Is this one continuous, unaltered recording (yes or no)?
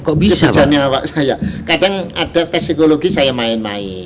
yes